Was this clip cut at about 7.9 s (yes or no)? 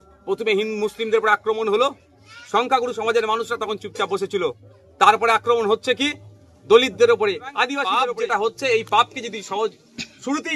yes